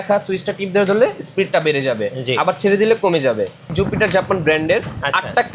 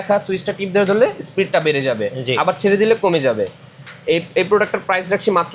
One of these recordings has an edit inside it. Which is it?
first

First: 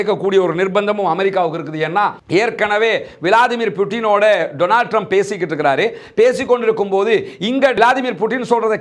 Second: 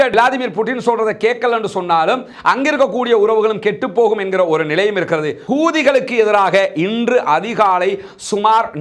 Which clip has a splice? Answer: second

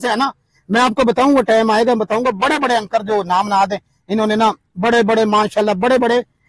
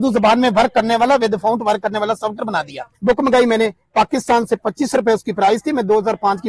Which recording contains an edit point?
second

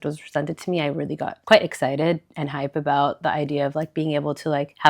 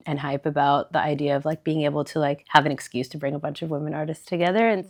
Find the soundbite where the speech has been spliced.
first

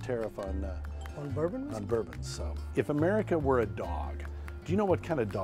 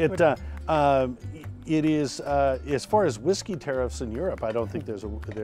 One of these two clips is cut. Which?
first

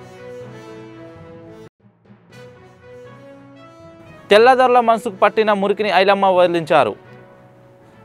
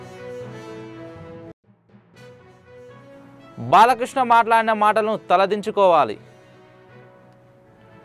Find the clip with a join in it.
first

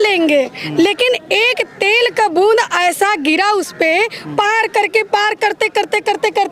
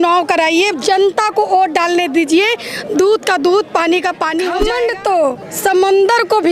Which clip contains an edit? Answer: second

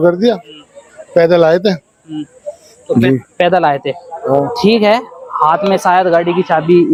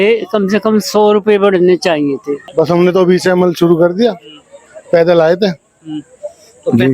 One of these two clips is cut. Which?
second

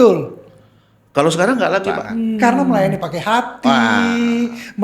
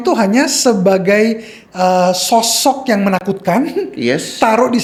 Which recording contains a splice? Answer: first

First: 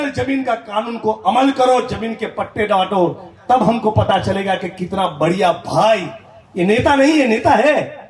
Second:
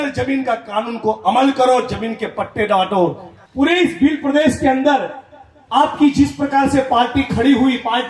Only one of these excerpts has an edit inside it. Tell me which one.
second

